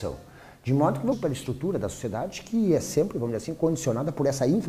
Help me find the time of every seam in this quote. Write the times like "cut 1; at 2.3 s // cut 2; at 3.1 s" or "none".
none